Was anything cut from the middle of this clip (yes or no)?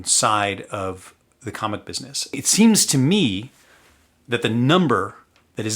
yes